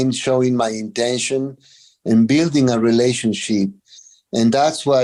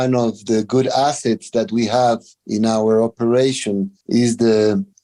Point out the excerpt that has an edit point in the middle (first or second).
second